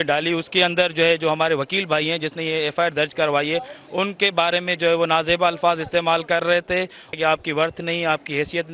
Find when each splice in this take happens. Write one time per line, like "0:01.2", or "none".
0:07.2